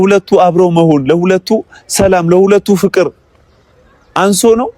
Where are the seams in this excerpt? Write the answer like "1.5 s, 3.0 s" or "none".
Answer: none